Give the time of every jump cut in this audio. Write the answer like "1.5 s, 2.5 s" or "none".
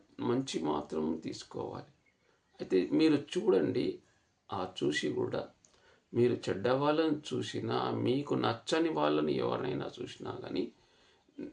none